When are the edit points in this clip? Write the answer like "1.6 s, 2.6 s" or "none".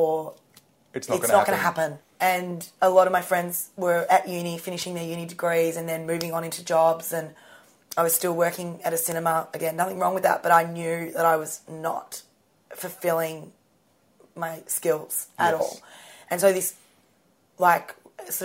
2.0 s